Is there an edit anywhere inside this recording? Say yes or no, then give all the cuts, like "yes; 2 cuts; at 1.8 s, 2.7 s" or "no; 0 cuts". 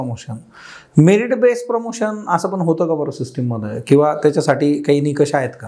no; 0 cuts